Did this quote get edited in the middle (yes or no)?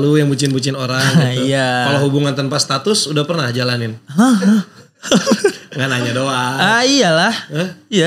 no